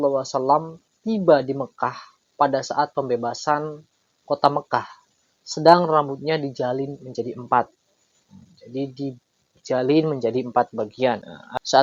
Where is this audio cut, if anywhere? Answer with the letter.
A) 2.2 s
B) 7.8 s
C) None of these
C